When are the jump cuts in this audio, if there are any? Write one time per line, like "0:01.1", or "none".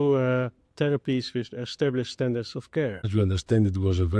0:03.1

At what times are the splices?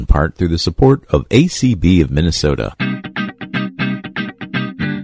0:02.7

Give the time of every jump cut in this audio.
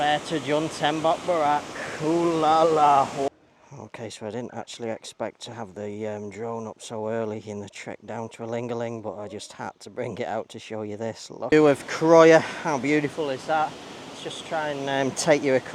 0:03.3
0:11.5

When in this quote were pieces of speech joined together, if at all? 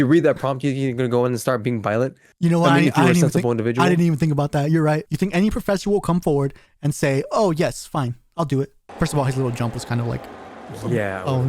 0:05.0
0:08.8

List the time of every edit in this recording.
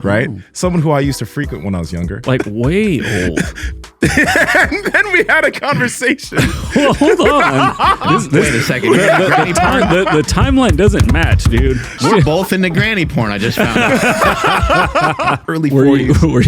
0:02.2
0:12.0
0:15.4

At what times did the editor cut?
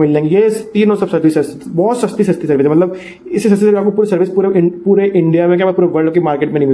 none

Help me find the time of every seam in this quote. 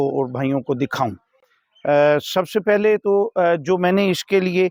none

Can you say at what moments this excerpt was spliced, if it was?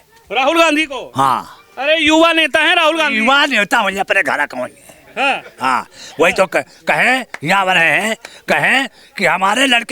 none

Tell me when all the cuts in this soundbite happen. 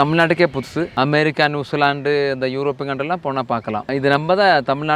0:00.9

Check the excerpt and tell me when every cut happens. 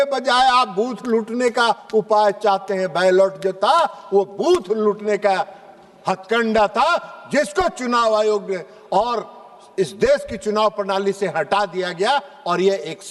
none

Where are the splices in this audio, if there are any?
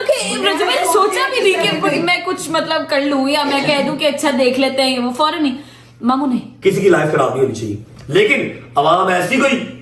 0:06.5

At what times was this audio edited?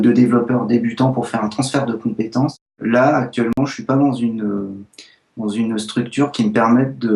0:02.7

